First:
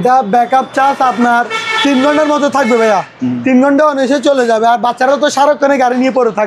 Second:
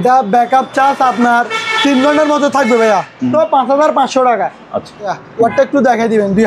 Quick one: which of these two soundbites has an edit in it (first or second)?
second